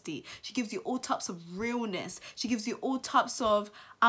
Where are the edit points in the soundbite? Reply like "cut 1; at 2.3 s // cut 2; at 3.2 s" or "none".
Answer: none